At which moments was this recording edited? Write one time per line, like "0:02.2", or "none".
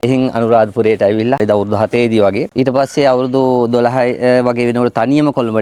none